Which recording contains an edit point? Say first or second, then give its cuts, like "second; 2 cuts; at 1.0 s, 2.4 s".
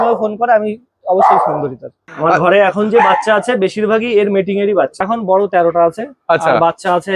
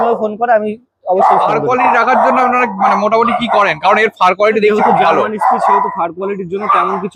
first; 2 cuts; at 1.6 s, 5.0 s